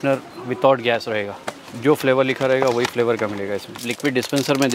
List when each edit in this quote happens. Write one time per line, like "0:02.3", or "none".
0:01.6
0:03.9